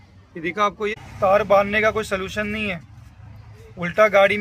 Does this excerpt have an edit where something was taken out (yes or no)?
yes